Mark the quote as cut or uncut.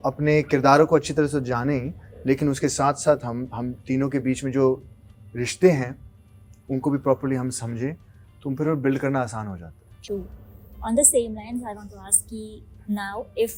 uncut